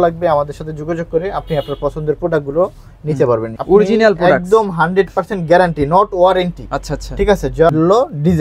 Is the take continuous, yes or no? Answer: no